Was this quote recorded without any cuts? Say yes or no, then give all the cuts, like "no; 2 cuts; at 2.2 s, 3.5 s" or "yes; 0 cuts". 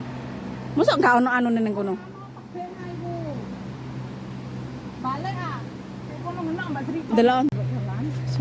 no; 1 cut; at 7.5 s